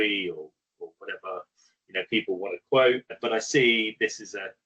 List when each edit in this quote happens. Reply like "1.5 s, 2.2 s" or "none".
3.1 s